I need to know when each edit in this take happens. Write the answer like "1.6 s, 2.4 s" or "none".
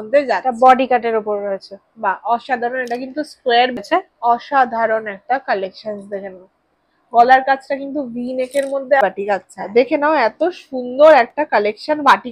3.8 s, 9.0 s